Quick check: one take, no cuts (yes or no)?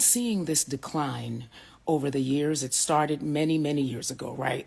yes